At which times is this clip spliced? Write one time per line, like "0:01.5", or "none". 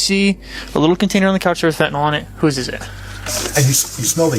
0:03.3